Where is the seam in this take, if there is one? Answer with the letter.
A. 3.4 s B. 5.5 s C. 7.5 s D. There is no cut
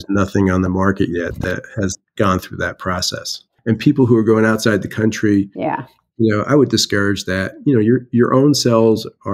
A